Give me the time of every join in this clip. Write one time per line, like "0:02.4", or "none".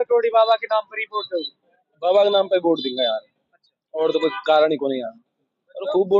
none

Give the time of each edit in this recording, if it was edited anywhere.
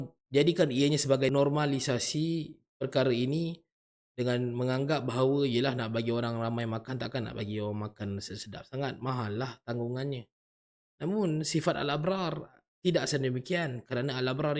0:01.3

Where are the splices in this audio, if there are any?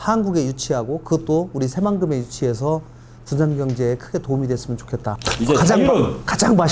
0:05.2

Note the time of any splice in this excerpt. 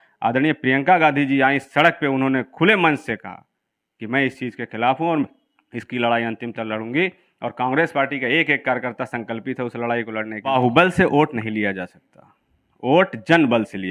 0:10.5

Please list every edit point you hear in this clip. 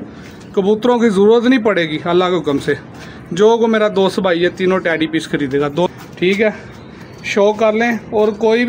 0:05.9

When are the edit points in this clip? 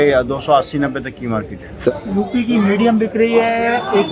0:01.9

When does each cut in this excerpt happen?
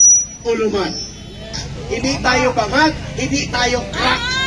0:01.7

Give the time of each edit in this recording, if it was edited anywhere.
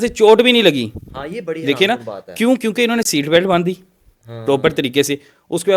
none

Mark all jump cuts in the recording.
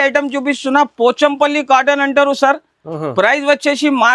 none

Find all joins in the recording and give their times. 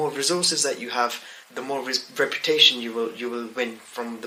none

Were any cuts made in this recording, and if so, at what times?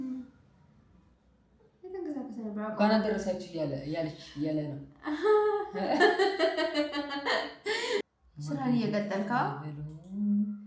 0:08.1

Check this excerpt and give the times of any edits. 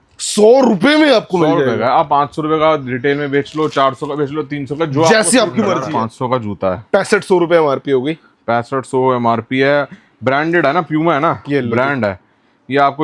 0:05.9

